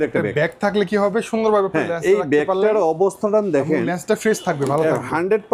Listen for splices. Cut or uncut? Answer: uncut